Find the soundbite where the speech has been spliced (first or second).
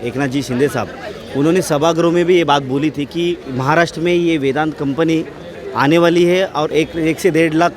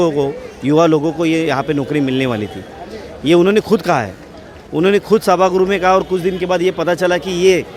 first